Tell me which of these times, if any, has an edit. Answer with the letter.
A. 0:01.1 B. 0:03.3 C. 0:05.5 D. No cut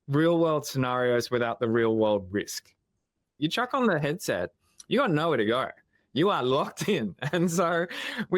B